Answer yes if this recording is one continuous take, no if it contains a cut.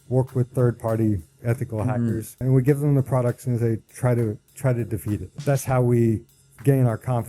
no